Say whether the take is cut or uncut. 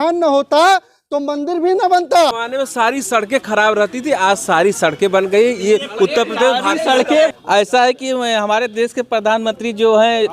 cut